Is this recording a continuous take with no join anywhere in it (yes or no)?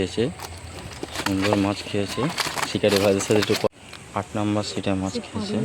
no